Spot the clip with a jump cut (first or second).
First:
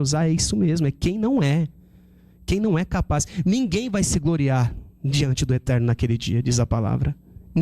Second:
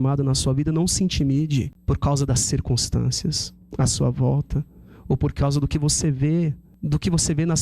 second